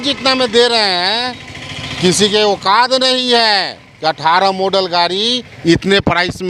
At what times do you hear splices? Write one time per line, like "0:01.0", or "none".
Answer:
none

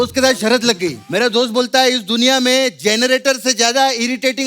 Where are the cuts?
0:01.0

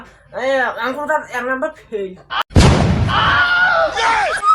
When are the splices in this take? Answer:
0:02.4

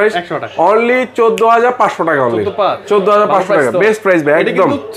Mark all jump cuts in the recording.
none

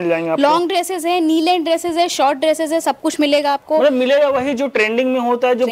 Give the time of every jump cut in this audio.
none

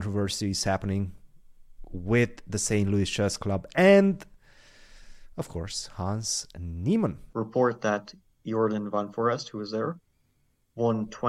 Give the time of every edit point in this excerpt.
0:07.2

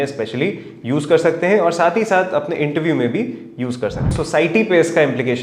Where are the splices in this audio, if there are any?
0:04.2

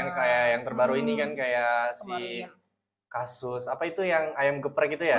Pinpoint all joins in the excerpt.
none

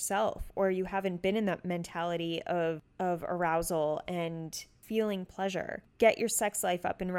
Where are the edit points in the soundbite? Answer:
0:02.9
0:04.8
0:05.8

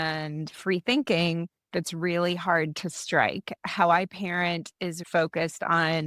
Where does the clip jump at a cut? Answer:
0:03.5
0:05.0

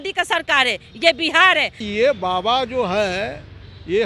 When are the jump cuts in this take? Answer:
0:01.9

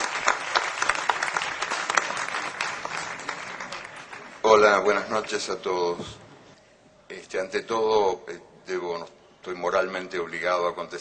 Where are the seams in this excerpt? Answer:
none

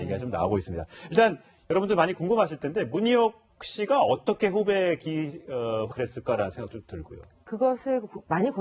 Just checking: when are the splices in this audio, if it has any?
none

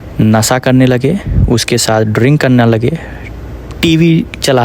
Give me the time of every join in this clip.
none

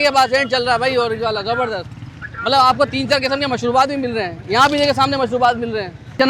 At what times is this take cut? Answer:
none

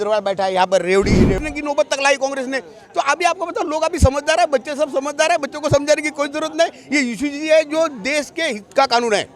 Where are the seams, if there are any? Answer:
0:01.4

